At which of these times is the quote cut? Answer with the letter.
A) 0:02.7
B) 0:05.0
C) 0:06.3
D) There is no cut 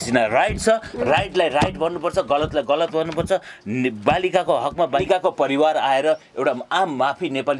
B